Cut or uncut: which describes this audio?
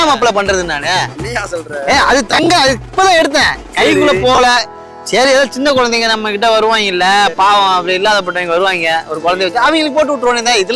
uncut